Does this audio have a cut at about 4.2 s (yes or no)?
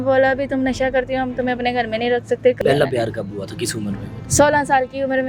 yes